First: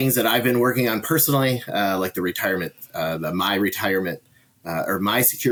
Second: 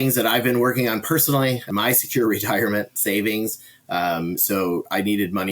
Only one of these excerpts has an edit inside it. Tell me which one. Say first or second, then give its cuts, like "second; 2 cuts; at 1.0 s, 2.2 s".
second; 1 cut; at 1.7 s